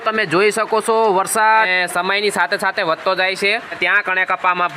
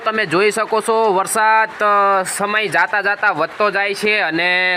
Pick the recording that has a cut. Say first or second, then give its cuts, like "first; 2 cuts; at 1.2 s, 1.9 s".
first; 2 cuts; at 1.7 s, 3.8 s